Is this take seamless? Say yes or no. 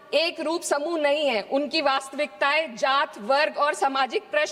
yes